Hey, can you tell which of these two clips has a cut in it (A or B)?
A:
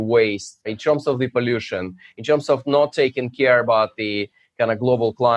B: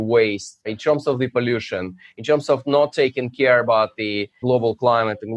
B